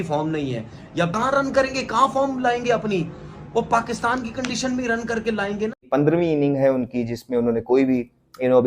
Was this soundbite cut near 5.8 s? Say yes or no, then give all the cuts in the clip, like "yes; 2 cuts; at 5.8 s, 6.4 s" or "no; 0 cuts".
yes; 2 cuts; at 1.1 s, 5.8 s